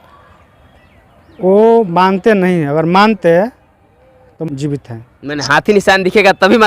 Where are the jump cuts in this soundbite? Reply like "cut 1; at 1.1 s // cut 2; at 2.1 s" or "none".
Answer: cut 1; at 4.4 s